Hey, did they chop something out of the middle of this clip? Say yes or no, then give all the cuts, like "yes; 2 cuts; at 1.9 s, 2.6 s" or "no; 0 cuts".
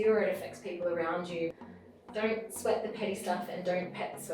yes; 1 cut; at 1.5 s